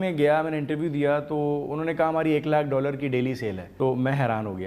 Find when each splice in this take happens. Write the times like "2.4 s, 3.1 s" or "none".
3.6 s